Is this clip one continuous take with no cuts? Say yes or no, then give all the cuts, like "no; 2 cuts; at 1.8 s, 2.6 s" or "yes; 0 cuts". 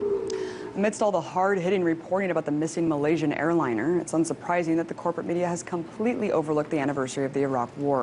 no; 1 cut; at 6.5 s